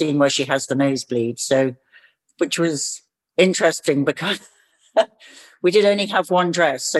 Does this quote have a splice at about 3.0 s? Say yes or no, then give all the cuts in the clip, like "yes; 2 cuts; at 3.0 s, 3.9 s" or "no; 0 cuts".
no; 0 cuts